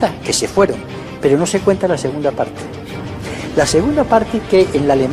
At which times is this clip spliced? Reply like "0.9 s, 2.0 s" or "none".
0.9 s